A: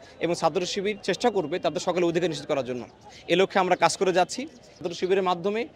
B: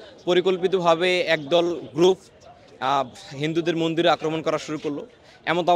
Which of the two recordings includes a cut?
A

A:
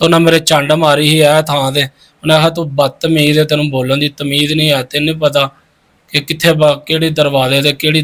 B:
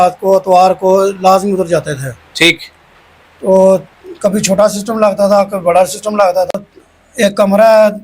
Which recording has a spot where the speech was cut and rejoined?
B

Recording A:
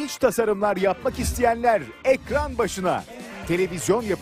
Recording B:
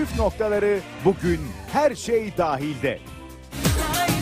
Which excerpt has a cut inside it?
B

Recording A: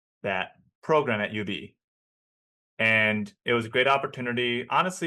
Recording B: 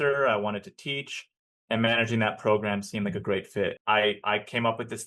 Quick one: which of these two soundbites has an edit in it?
B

